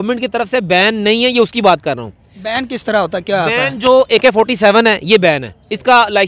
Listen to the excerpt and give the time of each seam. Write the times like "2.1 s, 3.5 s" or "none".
none